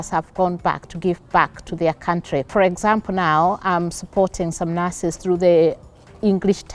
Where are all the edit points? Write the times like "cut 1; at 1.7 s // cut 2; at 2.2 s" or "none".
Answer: cut 1; at 2.5 s